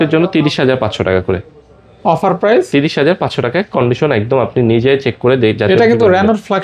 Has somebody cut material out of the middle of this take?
no; 0 cuts

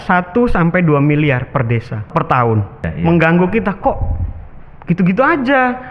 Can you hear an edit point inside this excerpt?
yes; 2 cuts; at 2.1 s, 2.9 s

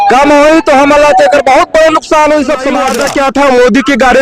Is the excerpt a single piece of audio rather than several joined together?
no; 1 cut; at 2.8 s

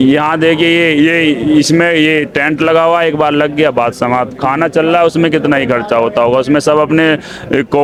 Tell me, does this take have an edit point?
no; 0 cuts

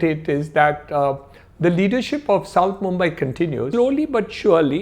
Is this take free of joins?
no; 1 cut; at 3.7 s

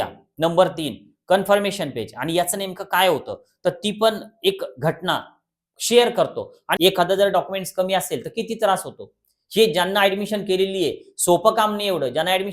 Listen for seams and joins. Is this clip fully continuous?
no; 1 cut; at 6.8 s

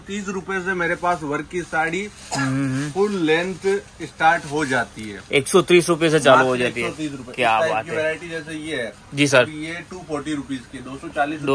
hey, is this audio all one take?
yes; 0 cuts

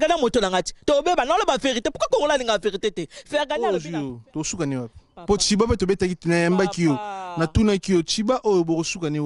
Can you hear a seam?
yes; 1 cut; at 3.7 s

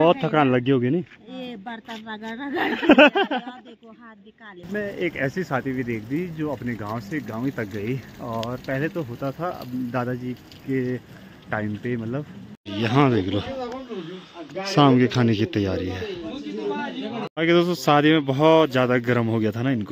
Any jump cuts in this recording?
yes; 3 cuts; at 4.7 s, 12.6 s, 17.5 s

